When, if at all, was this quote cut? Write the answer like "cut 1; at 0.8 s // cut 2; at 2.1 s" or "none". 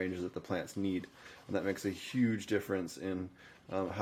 none

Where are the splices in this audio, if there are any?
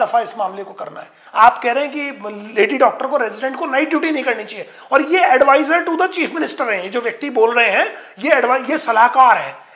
cut 1; at 1.2 s

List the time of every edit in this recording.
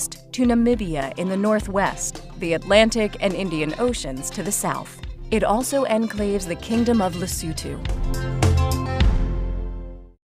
none

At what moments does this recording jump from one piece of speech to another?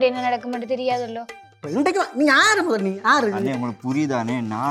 cut 1; at 1.6 s

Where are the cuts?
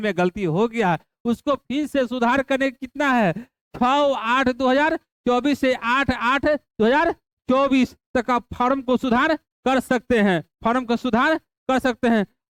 none

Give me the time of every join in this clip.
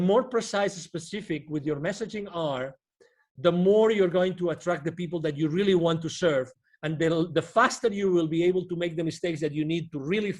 none

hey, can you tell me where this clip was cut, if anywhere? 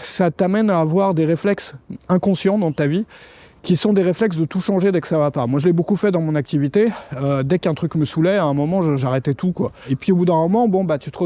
cut 1; at 9.9 s

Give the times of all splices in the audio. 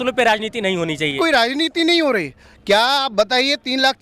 cut 1; at 1.2 s

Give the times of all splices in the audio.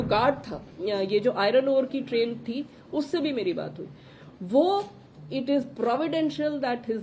none

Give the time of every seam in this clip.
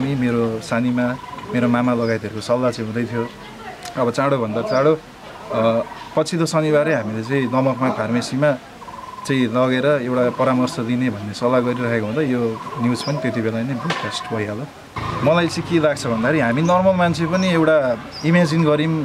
cut 1; at 14.9 s

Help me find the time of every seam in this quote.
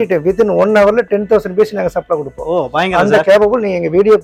none

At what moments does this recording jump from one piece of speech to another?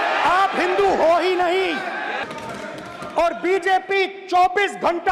cut 1; at 2.3 s

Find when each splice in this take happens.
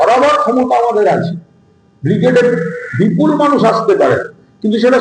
none

